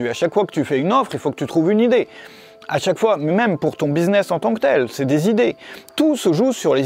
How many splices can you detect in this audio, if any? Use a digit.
0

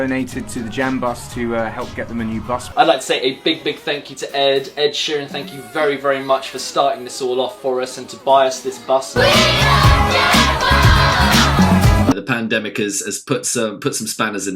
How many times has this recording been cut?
3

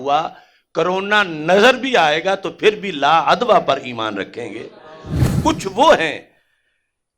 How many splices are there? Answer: 1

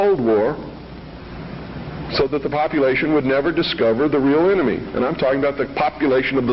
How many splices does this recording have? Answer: 1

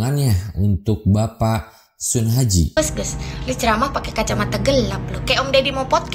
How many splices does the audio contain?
1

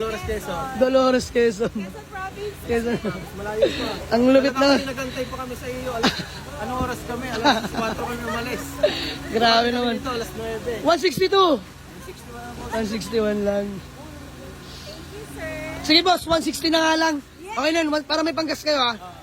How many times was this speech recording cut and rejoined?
0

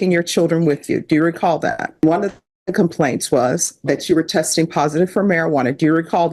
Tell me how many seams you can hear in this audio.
1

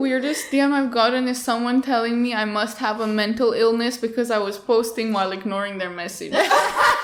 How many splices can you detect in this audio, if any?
0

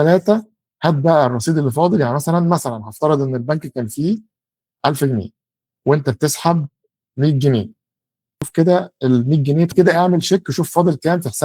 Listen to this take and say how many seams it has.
2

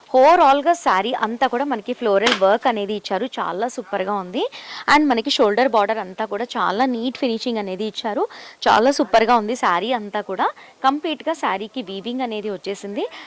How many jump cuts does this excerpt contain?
0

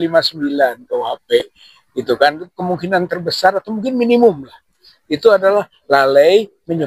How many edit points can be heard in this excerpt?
0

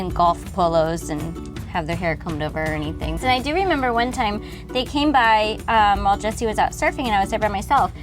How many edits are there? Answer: 2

